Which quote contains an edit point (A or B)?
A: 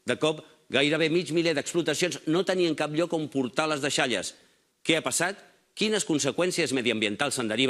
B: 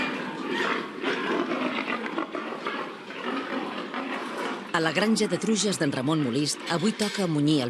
A